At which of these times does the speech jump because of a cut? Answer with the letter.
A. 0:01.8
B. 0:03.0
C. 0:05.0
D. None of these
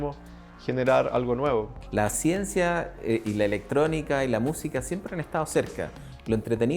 A